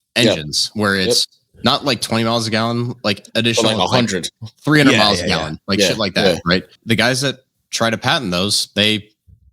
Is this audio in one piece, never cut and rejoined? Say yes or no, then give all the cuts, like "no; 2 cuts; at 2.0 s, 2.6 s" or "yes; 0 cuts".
no; 1 cut; at 6.7 s